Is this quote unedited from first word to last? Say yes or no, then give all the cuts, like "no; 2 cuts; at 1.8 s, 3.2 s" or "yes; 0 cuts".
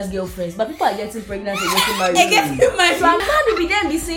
no; 1 cut; at 3.2 s